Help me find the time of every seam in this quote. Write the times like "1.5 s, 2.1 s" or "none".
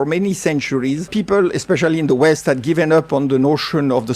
1.1 s